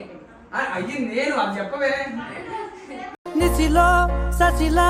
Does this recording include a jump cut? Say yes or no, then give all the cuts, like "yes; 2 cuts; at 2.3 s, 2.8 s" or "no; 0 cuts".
no; 0 cuts